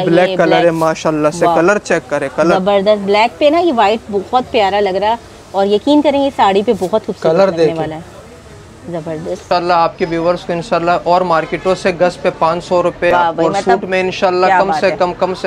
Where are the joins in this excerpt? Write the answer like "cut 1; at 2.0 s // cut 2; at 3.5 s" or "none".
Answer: cut 1; at 9.4 s // cut 2; at 13.1 s